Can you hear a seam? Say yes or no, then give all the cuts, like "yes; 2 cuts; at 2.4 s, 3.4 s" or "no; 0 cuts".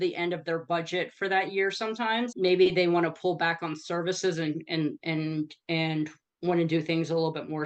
yes; 1 cut; at 2.3 s